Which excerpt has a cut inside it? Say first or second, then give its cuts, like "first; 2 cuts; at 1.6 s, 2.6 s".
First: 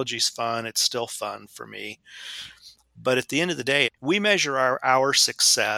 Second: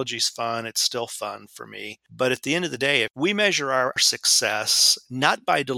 second; 2 cuts; at 2.0 s, 4.0 s